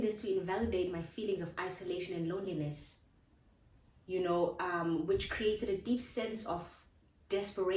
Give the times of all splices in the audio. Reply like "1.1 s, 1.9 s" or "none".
none